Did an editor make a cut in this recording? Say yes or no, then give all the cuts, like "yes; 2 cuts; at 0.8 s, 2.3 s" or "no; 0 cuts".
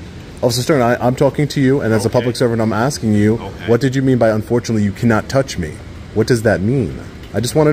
no; 0 cuts